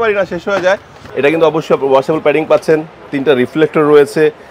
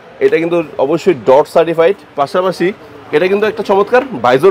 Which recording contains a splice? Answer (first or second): first